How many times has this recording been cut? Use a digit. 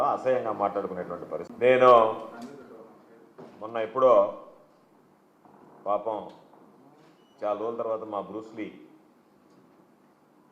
1